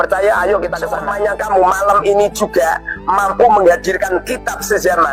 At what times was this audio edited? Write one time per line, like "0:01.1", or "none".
0:01.0